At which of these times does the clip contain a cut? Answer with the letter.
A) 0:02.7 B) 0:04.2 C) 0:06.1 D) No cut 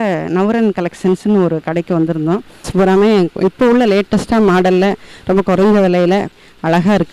A